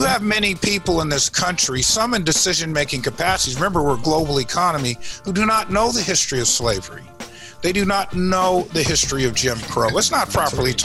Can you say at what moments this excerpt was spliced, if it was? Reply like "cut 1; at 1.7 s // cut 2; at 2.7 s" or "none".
none